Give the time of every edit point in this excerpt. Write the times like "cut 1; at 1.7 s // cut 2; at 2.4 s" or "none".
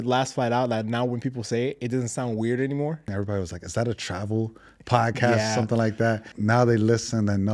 cut 1; at 3.1 s // cut 2; at 6.3 s